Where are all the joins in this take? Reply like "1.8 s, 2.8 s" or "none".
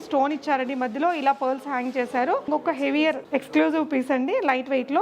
2.5 s